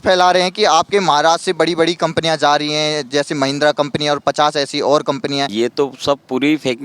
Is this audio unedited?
no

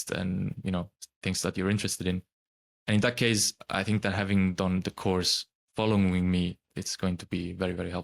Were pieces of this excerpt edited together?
yes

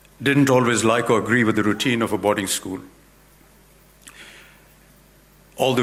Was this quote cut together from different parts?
no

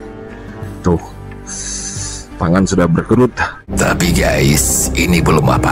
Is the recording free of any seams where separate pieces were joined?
no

